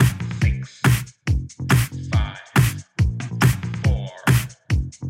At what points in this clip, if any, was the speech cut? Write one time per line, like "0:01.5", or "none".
0:03.8